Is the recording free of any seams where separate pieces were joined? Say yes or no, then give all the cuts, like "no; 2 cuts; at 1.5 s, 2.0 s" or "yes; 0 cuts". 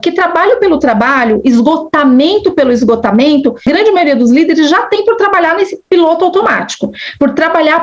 no; 1 cut; at 3.6 s